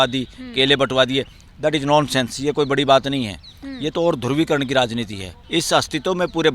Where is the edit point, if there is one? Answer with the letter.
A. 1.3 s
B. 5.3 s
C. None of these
B